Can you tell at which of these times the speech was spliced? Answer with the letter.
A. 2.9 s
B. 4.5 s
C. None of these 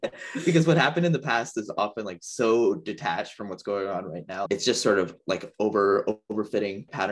B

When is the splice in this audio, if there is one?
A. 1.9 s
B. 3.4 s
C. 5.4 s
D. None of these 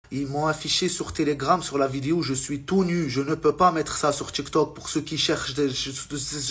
D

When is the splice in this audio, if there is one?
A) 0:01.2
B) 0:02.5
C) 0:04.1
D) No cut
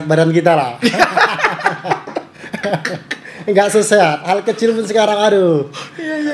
D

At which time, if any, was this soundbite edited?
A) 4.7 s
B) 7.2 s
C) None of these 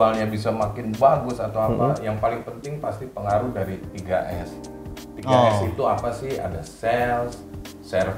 C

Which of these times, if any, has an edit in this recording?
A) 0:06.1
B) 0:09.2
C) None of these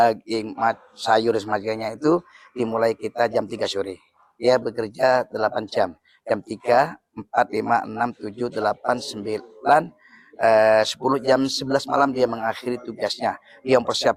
C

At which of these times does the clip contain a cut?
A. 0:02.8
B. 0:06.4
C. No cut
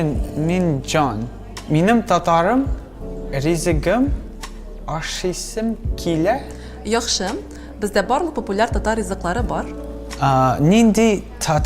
B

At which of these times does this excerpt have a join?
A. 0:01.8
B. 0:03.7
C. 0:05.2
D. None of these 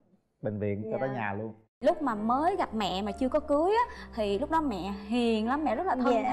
A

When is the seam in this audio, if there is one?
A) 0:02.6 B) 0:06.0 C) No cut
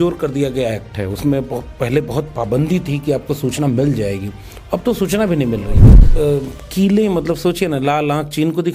B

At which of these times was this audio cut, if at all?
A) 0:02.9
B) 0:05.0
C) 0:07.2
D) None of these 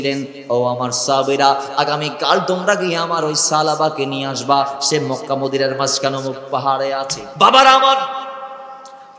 C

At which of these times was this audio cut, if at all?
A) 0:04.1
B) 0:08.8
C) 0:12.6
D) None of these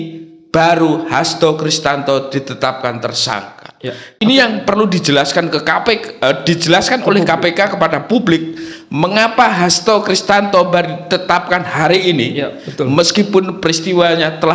A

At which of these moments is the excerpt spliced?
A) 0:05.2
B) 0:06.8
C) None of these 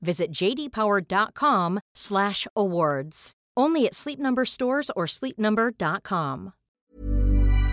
B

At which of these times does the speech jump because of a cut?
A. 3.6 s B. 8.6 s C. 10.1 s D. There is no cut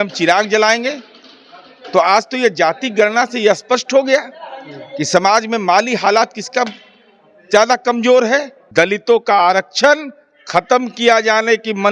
B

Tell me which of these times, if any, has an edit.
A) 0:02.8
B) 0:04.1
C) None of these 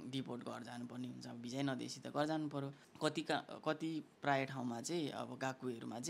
A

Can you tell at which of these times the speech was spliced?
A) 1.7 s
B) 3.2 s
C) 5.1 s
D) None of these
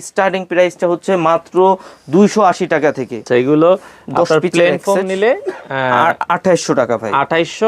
B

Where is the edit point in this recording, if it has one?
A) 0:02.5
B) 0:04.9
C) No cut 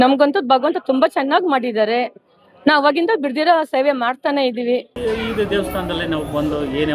B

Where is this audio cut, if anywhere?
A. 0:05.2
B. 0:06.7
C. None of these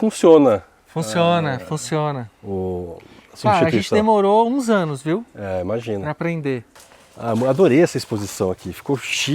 B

